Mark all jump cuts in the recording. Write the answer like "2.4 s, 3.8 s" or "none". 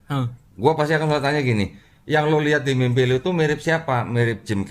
none